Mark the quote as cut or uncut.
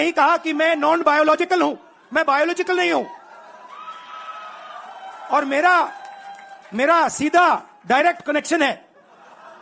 uncut